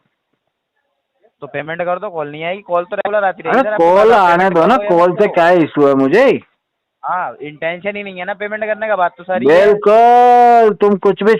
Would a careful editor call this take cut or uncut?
uncut